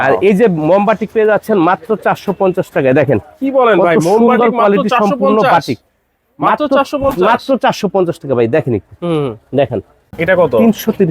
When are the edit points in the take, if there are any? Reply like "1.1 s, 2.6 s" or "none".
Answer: 10.1 s